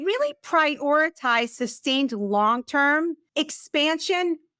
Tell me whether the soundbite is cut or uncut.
cut